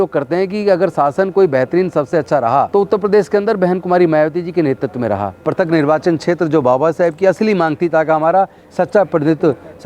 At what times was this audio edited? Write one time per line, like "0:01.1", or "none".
0:02.7
0:05.3